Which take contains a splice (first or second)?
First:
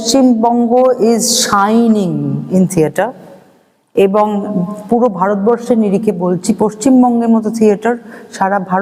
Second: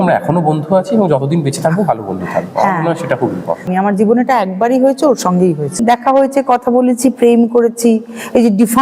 second